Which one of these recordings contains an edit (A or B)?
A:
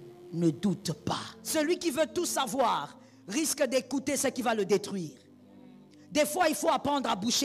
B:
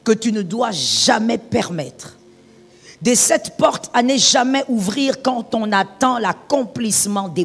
A